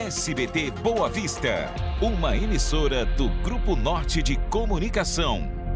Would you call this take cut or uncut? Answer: uncut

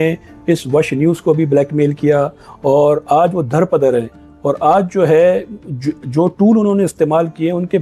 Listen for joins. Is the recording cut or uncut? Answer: uncut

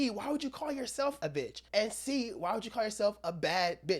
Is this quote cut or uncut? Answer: cut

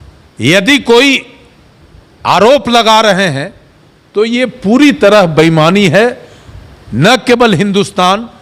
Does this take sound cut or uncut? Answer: uncut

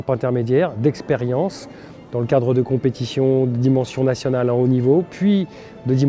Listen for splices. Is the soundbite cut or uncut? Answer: uncut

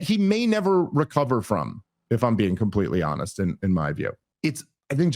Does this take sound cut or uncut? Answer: cut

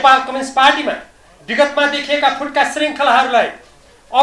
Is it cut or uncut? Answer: uncut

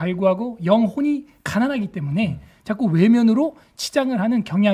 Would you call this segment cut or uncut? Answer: uncut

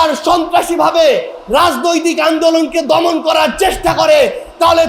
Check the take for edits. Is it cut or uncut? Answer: uncut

